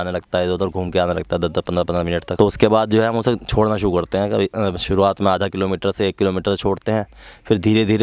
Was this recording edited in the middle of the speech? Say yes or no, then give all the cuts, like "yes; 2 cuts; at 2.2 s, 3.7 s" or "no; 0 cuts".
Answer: no; 0 cuts